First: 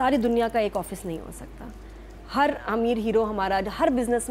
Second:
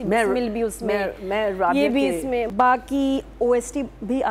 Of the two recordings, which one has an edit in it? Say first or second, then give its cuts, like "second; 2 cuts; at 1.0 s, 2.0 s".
second; 1 cut; at 2.5 s